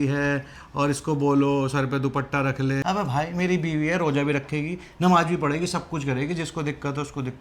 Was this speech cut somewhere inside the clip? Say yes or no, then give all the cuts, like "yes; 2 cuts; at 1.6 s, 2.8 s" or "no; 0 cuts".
yes; 1 cut; at 2.8 s